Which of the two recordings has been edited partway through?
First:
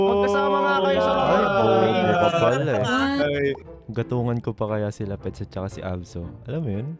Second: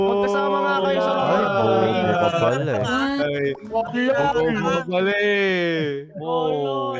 first; 1 cut; at 3.6 s

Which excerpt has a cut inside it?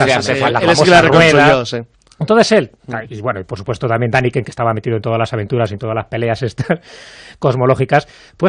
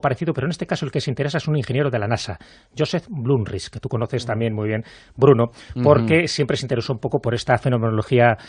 first; 1 cut; at 5.9 s

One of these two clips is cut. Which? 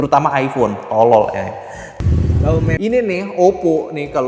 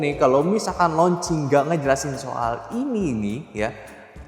first; 1 cut; at 2.8 s

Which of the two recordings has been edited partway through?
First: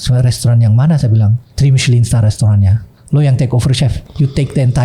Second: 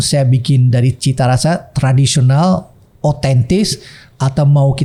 first; 2 cuts; at 1.4 s, 4.0 s

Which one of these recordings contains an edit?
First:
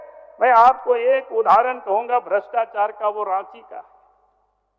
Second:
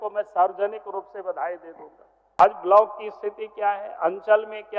second; 1 cut; at 2.4 s

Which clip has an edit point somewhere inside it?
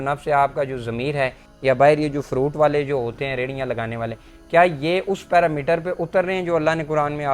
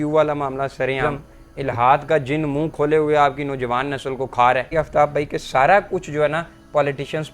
second; 2 cuts; at 1.0 s, 4.7 s

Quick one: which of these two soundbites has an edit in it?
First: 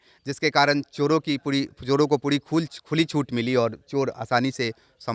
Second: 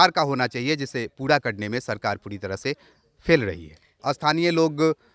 second; 1 cut; at 4.0 s

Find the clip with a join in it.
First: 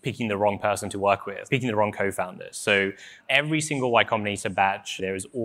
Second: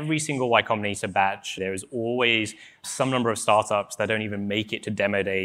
first; 1 cut; at 1.4 s

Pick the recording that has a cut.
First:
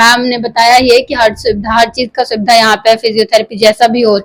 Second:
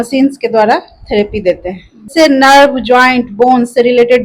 second; 1 cut; at 2.1 s

